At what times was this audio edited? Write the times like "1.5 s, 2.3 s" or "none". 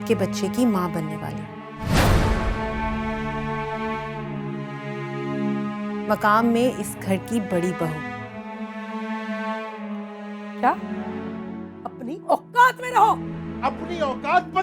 11.0 s